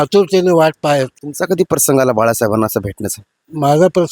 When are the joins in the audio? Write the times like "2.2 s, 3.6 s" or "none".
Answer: 1.2 s